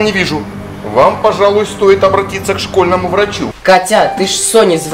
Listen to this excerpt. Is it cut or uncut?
cut